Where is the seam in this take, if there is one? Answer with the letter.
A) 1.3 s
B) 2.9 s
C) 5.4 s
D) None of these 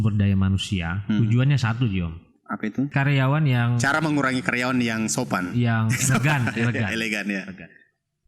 B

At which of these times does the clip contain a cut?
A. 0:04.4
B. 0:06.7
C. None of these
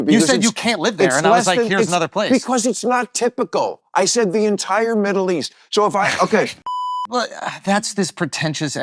B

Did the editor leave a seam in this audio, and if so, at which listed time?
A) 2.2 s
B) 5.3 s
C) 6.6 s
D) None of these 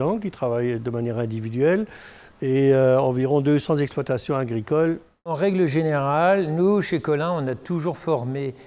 B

